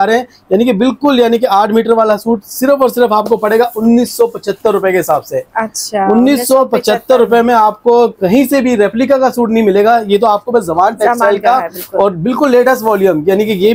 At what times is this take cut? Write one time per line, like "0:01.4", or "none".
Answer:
none